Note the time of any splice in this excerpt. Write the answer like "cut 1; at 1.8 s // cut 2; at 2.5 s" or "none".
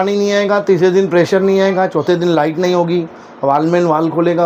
none